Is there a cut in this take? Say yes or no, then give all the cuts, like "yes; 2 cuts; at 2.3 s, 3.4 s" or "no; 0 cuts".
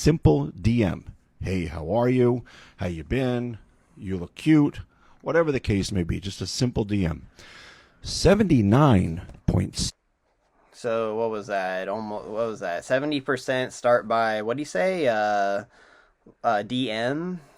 no; 0 cuts